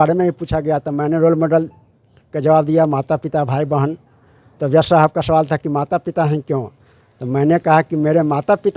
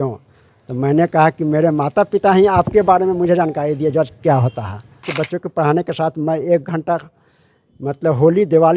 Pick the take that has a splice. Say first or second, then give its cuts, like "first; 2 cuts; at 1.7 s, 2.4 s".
second; 1 cut; at 5.1 s